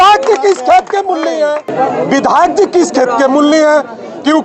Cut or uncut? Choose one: cut